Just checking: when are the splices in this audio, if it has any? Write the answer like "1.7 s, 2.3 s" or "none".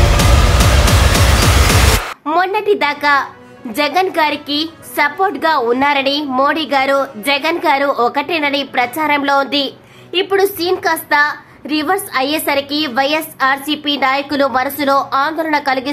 none